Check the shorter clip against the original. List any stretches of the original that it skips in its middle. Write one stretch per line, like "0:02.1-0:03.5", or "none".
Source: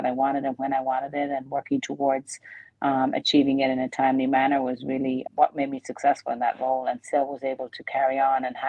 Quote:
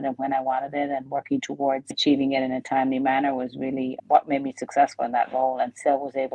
0:02.3-0:03.2